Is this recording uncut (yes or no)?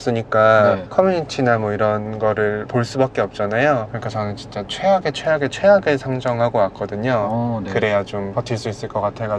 no